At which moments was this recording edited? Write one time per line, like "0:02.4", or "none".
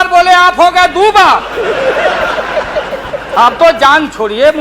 none